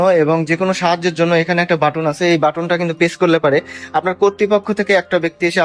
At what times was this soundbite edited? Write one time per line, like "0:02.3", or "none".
none